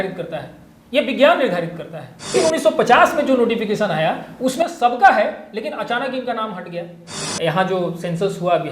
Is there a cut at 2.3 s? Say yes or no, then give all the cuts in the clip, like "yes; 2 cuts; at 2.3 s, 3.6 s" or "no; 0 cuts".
yes; 2 cuts; at 2.3 s, 7.2 s